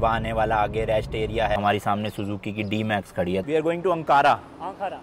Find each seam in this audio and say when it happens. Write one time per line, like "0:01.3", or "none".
0:01.6
0:03.4

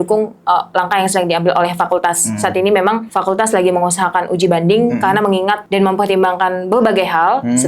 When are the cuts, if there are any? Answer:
0:03.1
0:05.6

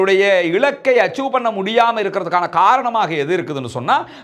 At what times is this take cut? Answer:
none

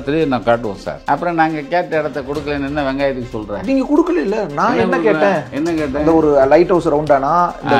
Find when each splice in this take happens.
0:00.9

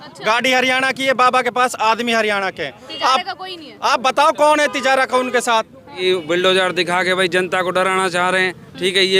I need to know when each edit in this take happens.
0:06.0

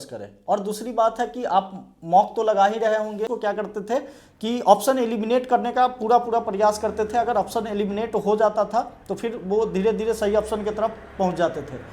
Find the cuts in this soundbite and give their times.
0:03.2

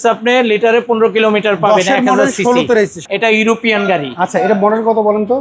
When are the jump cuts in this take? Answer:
0:03.1

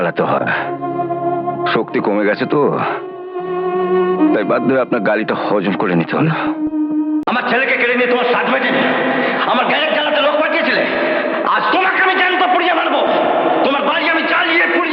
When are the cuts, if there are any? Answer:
0:07.2

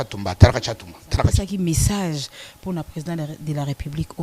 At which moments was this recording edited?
0:01.3

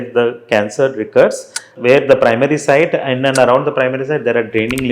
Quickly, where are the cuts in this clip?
0:01.7

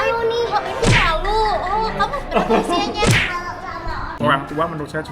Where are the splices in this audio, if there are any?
0:04.2

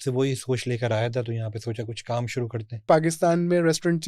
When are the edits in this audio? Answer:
0:02.9

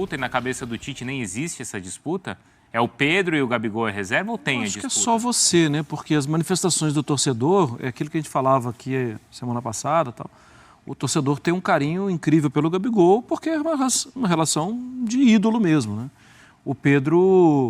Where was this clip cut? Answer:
none

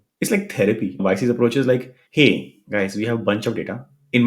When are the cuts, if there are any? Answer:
0:00.9

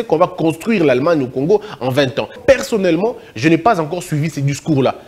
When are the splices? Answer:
0:02.4

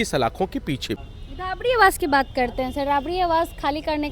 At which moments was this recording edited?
0:01.1

